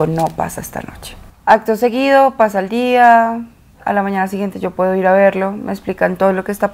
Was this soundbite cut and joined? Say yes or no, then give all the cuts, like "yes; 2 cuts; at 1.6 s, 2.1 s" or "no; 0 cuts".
no; 0 cuts